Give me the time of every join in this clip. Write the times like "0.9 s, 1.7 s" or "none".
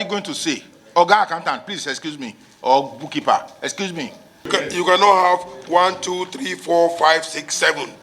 4.5 s